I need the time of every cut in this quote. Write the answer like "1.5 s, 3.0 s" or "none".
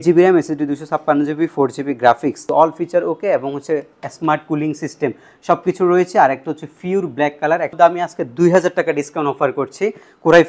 2.4 s, 7.7 s